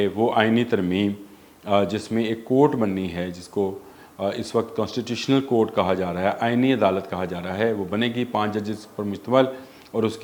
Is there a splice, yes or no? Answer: no